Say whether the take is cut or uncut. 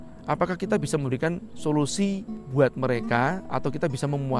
cut